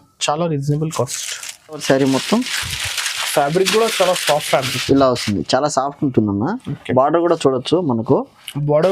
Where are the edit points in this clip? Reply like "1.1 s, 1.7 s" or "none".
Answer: 1.8 s